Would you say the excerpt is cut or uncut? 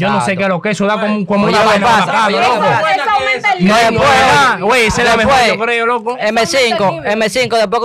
uncut